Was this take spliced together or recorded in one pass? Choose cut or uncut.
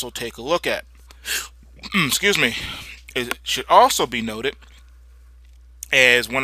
uncut